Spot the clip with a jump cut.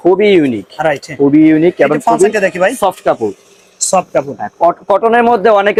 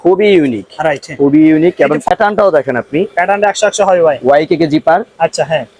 second; 1 cut; at 2.1 s

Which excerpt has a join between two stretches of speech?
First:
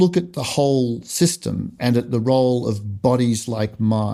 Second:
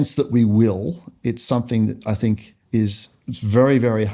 second; 1 cut; at 2.8 s

